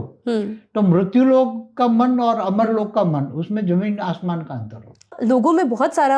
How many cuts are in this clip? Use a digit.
1